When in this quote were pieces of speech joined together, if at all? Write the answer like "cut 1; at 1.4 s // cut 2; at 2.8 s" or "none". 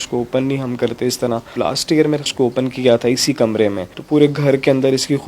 cut 1; at 1.5 s // cut 2; at 3.9 s